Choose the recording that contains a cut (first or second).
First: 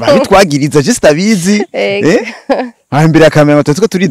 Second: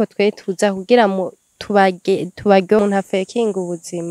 second